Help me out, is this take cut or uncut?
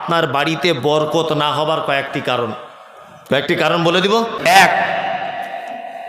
cut